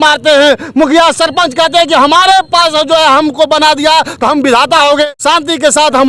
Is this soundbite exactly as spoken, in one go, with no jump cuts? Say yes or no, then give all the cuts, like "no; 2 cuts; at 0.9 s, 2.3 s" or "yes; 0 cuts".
no; 1 cut; at 5.1 s